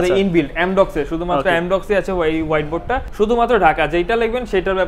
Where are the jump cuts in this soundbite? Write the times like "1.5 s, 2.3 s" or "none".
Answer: 3.1 s